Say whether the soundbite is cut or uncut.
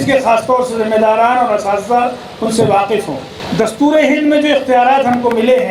cut